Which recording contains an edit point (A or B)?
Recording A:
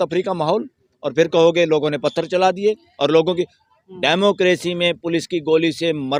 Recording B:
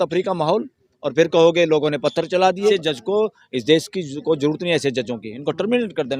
B